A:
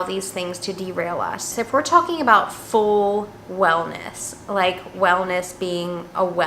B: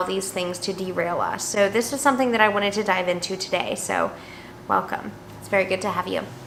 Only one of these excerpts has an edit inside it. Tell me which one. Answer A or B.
A